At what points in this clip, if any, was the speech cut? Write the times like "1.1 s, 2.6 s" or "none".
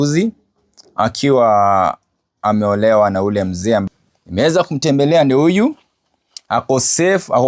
3.8 s